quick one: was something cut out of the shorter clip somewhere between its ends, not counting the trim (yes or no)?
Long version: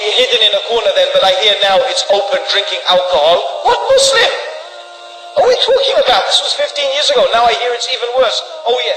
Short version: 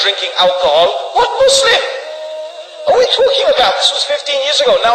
no